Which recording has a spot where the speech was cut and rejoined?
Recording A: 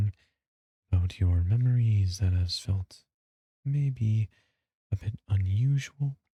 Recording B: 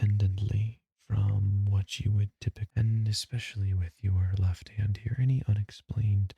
B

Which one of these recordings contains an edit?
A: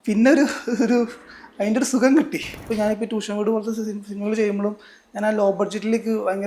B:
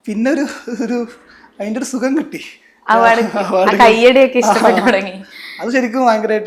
A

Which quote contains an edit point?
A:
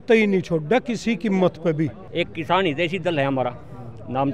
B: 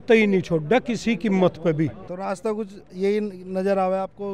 A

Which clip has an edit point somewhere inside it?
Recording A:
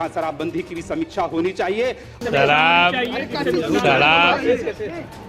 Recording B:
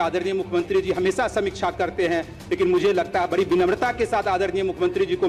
A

